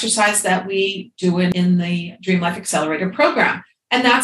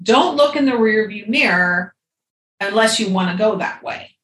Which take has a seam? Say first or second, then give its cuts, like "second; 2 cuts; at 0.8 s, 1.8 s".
first; 1 cut; at 1.5 s